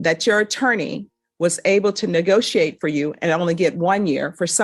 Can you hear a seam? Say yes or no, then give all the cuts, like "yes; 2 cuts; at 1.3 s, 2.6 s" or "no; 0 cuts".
no; 0 cuts